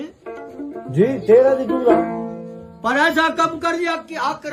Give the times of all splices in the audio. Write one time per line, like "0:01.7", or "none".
none

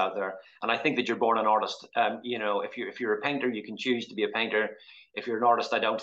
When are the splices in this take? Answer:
none

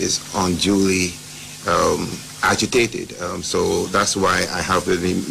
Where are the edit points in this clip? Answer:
0:02.1

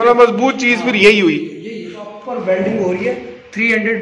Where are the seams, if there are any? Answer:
0:02.1

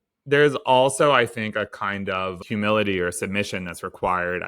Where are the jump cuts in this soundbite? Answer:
0:02.4

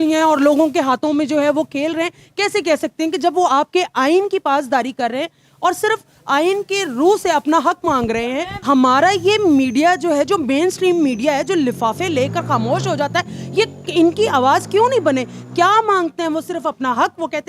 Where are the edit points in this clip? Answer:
0:08.5

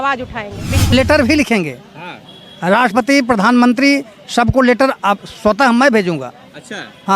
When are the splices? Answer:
0:00.9

